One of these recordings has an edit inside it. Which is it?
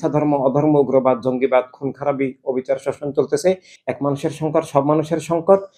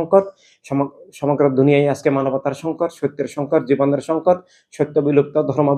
first; 1 cut; at 3.7 s

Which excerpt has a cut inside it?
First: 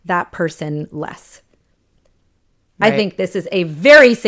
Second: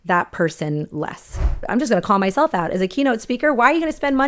second; 1 cut; at 1.6 s

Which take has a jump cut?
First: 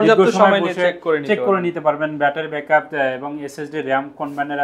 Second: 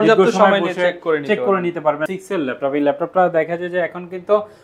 second; 1 cut; at 2.1 s

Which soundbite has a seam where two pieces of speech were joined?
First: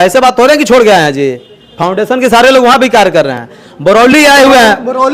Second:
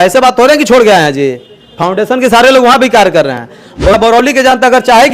second; 1 cut; at 3.9 s

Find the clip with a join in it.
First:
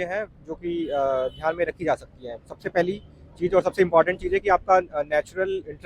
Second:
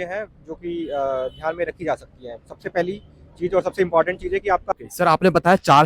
second; 1 cut; at 4.6 s

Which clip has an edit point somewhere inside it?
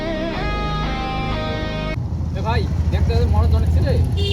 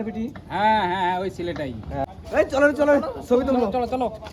first; 1 cut; at 1.9 s

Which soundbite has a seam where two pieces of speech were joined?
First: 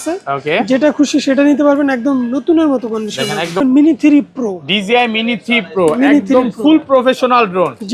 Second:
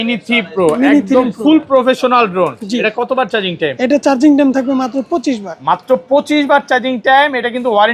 first; 1 cut; at 3.6 s

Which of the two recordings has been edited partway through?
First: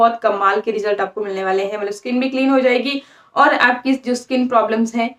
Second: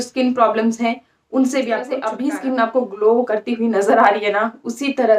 second; 1 cut; at 2.1 s

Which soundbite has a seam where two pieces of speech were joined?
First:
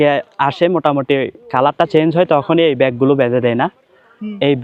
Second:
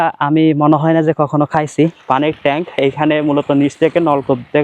second; 1 cut; at 2.0 s

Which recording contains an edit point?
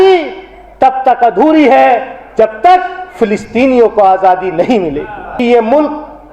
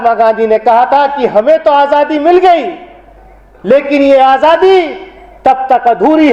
first; 1 cut; at 5.2 s

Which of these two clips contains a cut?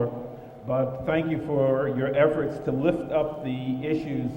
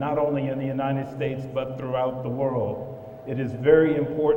first; 1 cut; at 3.4 s

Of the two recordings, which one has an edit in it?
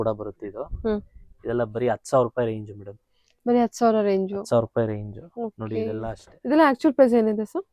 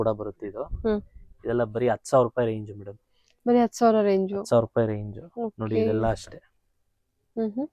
first; 1 cut; at 6.3 s

